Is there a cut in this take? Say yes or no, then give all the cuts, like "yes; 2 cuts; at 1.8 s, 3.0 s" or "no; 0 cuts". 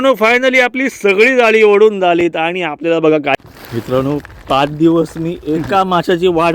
yes; 1 cut; at 3.3 s